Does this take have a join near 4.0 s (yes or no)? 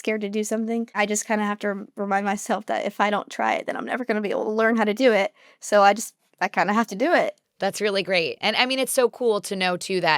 no